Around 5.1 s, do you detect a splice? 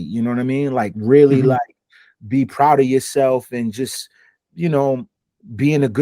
yes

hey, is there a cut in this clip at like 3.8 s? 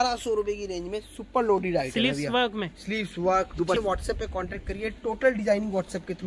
yes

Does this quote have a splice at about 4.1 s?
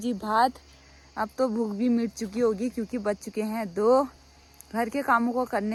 no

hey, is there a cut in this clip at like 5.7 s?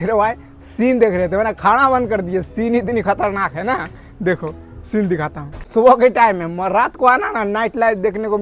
yes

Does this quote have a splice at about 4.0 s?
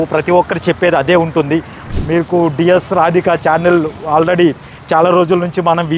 no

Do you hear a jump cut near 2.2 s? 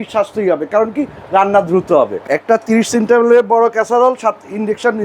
yes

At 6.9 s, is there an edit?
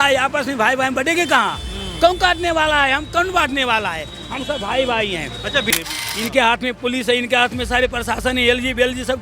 no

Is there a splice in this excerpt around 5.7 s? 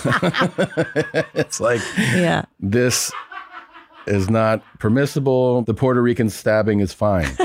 yes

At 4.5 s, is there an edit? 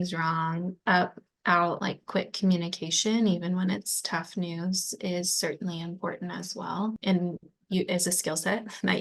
no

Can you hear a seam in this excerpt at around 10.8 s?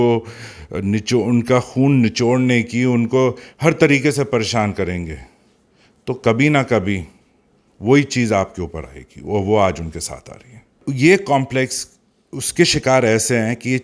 yes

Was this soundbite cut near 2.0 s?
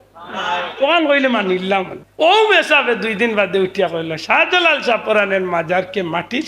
yes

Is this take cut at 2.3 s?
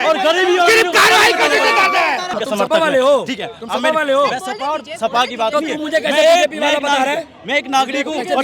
yes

